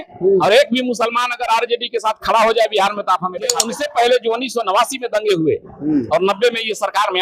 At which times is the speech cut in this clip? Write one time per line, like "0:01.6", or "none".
0:03.7